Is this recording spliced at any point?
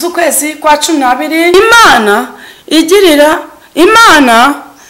yes; 1 cut; at 1.5 s

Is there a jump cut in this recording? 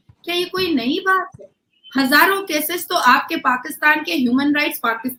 no; 0 cuts

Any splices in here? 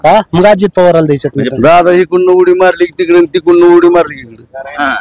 yes; 1 cut; at 1.5 s

